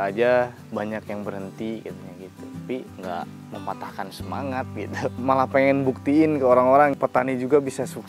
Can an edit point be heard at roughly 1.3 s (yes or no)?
no